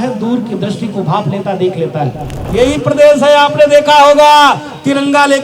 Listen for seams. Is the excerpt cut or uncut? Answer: cut